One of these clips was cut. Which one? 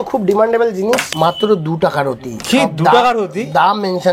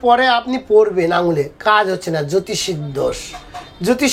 first; 1 cut; at 1.1 s

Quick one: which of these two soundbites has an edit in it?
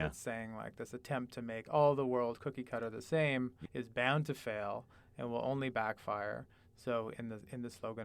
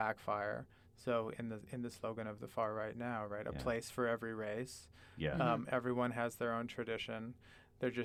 first; 1 cut; at 3.6 s

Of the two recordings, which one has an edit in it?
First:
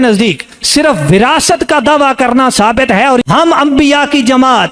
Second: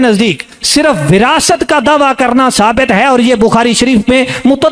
first; 1 cut; at 3.2 s

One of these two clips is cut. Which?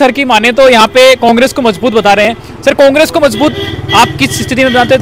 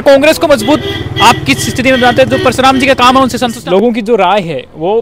second; 1 cut; at 3.6 s

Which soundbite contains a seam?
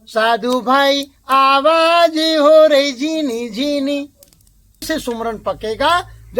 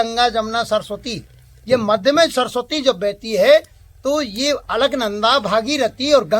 first; 1 cut; at 4.9 s

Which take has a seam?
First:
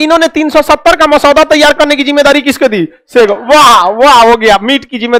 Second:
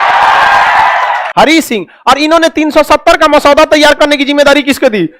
second; 1 cut; at 1.2 s

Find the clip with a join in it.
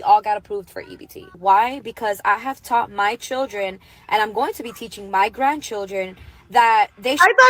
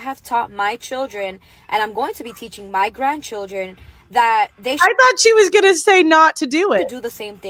first; 1 cut; at 1.3 s

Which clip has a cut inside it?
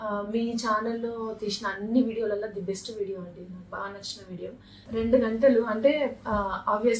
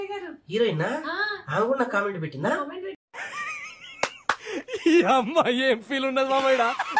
first; 1 cut; at 4.8 s

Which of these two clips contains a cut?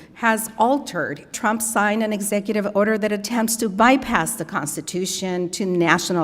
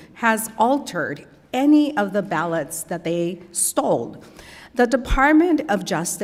first; 1 cut; at 1.3 s

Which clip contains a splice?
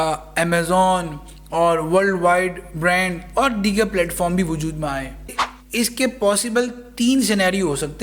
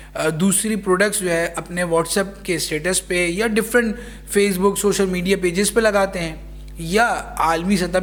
first; 1 cut; at 5.5 s

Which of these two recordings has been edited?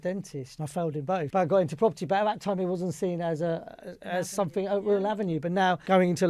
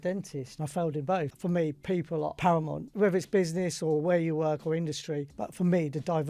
second; 3 cuts; at 1.3 s, 2.4 s, 5.4 s

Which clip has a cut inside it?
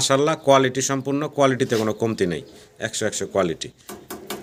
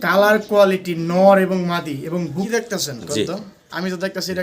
second; 1 cut; at 2.5 s

